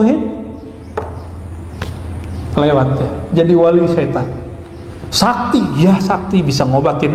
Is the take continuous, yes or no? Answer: yes